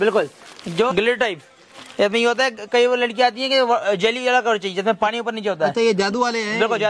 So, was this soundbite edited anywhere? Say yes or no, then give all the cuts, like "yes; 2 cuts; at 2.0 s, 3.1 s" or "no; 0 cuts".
yes; 1 cut; at 0.9 s